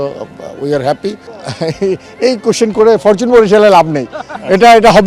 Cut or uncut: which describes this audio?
cut